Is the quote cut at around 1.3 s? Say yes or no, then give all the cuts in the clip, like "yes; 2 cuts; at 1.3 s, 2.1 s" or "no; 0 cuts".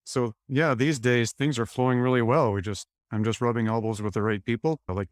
yes; 1 cut; at 1.3 s